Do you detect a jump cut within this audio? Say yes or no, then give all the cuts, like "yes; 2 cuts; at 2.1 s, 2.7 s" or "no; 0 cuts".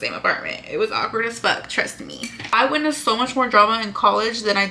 yes; 1 cut; at 2.5 s